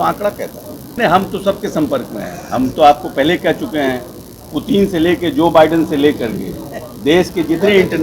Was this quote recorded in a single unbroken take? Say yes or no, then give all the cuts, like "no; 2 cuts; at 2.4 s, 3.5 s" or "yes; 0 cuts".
no; 1 cut; at 1.0 s